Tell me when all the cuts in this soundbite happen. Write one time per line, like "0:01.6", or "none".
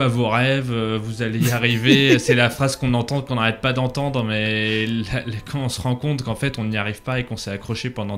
none